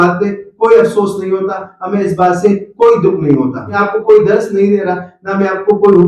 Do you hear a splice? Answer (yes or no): yes